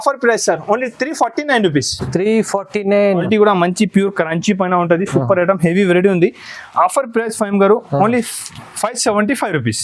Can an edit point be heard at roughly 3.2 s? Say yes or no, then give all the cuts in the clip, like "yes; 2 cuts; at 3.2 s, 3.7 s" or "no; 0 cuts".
yes; 1 cut; at 3.2 s